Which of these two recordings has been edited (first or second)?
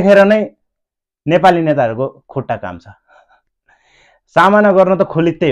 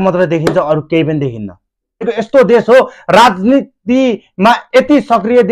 second